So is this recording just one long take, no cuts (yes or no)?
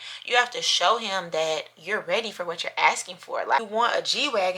no